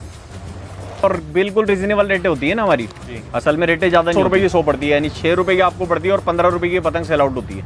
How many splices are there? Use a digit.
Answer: 2